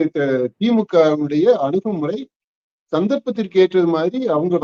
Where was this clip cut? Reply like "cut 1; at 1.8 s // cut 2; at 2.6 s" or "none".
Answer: none